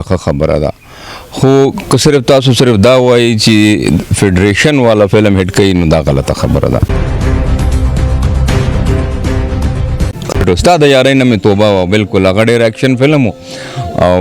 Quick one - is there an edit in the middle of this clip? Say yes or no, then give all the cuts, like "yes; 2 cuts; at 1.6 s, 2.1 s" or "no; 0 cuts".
yes; 2 cuts; at 6.9 s, 10.4 s